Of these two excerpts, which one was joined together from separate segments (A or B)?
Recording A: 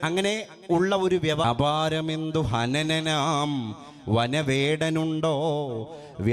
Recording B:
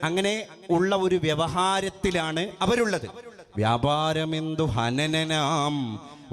A